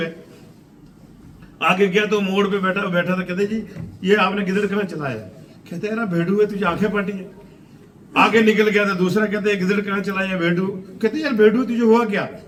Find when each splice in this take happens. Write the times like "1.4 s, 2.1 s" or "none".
none